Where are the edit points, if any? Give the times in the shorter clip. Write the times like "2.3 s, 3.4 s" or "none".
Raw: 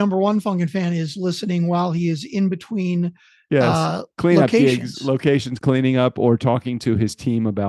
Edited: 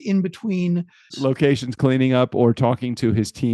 1.1 s